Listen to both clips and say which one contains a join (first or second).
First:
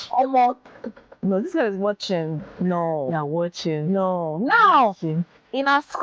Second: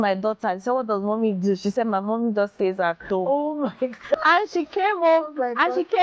second